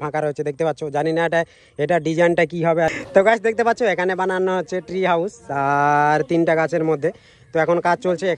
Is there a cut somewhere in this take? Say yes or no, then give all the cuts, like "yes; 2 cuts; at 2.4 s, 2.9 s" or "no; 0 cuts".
yes; 1 cut; at 3.0 s